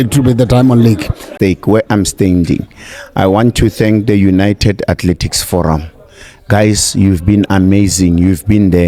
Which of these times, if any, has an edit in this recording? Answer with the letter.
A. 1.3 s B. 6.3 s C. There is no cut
A